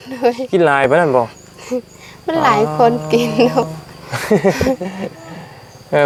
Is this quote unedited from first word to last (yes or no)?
yes